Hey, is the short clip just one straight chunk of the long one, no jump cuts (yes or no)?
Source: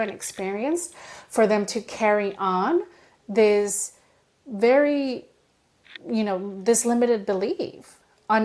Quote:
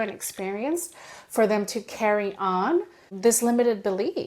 no